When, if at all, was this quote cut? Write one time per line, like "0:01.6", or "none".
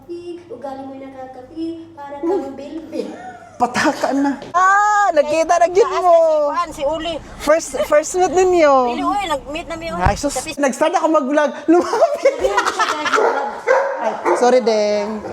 0:04.5
0:10.6